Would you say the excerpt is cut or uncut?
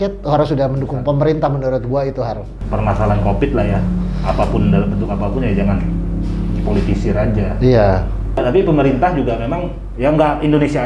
uncut